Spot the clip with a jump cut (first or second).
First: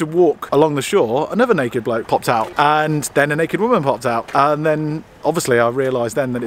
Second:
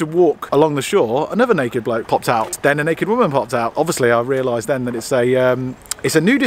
second